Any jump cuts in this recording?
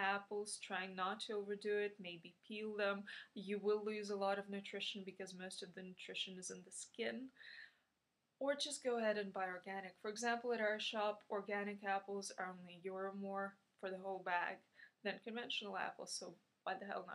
yes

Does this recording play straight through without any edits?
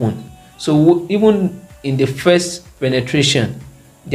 yes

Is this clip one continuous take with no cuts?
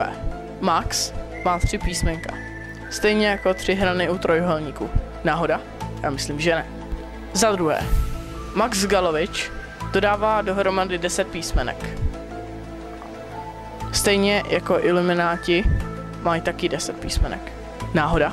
no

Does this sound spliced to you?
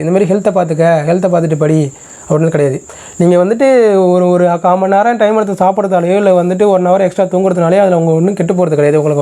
no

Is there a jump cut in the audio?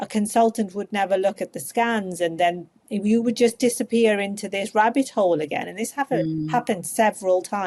no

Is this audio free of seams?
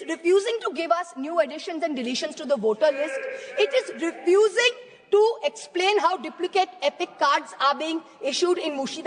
yes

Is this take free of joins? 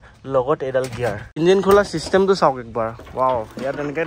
no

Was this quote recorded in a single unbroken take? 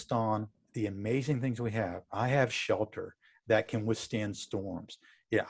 yes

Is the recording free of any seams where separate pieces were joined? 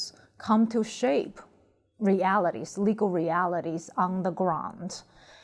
yes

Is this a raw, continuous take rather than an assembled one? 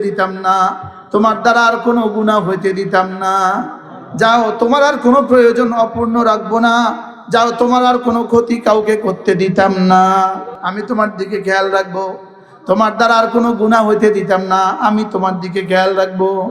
no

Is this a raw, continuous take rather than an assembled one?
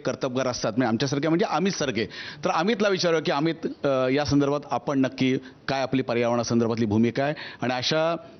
yes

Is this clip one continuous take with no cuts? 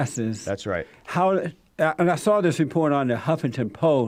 yes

